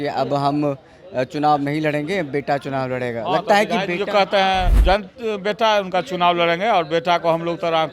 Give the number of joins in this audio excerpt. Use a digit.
1